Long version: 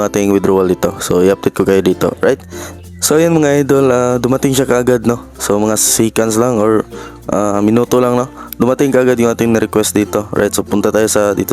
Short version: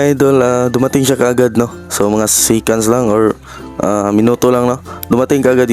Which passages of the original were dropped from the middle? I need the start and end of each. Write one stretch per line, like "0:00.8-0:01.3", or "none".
none